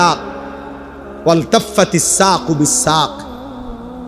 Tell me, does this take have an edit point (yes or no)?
no